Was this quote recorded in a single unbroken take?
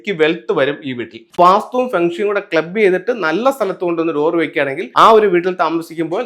no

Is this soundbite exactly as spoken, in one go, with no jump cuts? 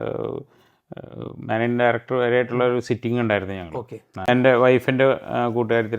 no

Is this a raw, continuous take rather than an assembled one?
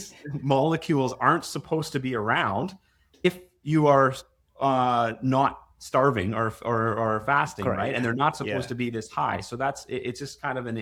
yes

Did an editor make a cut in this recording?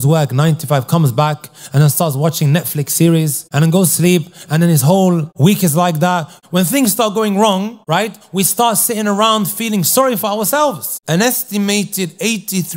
yes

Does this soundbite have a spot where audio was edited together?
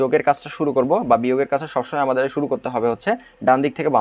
no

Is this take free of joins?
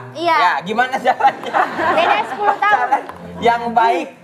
yes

